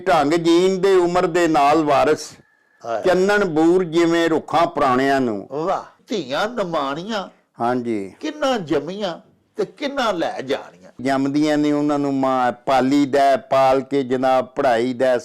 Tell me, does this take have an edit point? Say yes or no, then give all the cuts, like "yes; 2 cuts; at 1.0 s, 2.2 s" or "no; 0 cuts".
yes; 2 cuts; at 6.0 s, 11.0 s